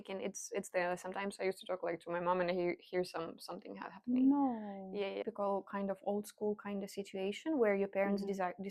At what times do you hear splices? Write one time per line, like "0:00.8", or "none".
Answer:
0:05.1